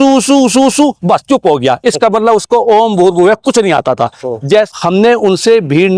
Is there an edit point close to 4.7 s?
yes; 1 cut; at 4.7 s

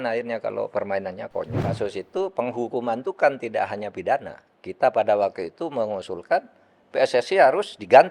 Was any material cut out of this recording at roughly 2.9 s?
no; 1 cut; at 1.7 s

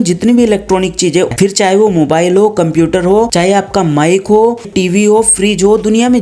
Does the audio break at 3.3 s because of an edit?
yes; 3 cuts; at 1.3 s, 3.3 s, 4.7 s

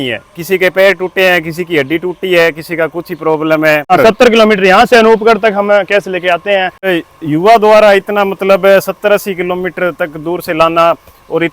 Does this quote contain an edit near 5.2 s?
no; 2 cuts; at 3.9 s, 6.9 s

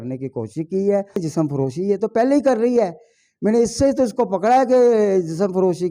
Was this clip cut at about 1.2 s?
yes; 1 cut; at 1.2 s

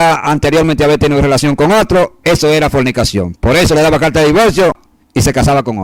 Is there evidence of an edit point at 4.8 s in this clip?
yes; 1 cut; at 4.8 s

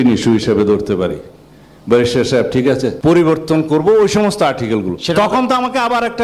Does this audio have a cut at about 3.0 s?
yes; 1 cut; at 3.0 s

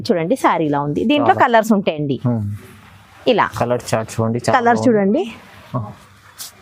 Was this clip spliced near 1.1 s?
no; 0 cuts

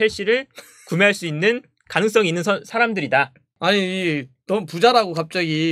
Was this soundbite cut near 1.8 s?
no; 1 cut; at 3.5 s

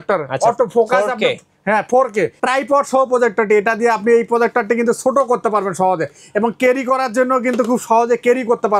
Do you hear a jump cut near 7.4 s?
no; 1 cut; at 2.4 s

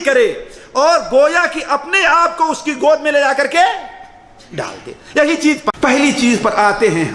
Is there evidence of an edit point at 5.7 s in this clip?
yes; 1 cut; at 5.7 s

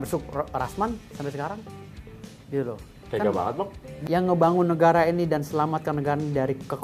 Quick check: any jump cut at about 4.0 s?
yes; 1 cut; at 4.0 s

